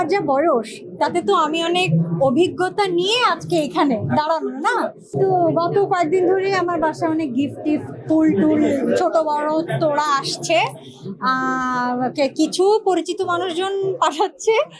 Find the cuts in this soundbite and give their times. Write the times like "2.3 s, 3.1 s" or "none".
5.0 s